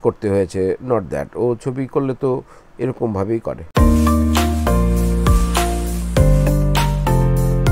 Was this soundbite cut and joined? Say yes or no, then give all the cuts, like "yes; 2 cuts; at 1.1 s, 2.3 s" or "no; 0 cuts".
no; 0 cuts